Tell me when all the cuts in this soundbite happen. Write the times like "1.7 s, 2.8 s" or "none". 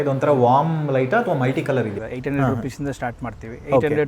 2.0 s